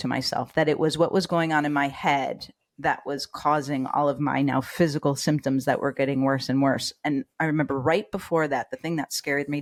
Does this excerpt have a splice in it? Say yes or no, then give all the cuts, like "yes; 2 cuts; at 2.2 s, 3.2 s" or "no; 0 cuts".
no; 0 cuts